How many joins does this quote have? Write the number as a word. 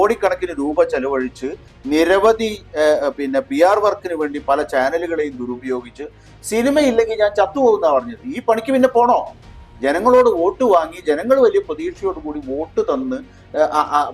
one